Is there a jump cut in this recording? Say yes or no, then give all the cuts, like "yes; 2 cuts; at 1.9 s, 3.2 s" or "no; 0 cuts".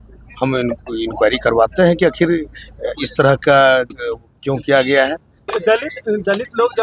yes; 1 cut; at 5.5 s